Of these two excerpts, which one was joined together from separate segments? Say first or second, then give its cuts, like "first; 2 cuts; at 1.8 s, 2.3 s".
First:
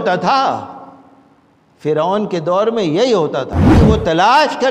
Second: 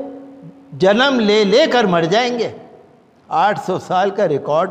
first; 1 cut; at 3.8 s